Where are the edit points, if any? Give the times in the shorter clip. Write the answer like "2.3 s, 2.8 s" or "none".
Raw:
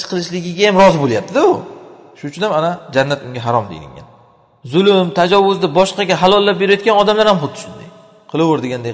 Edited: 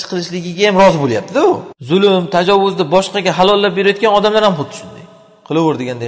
1.7 s